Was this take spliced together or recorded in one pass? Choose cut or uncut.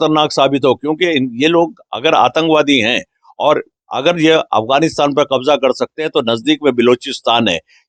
uncut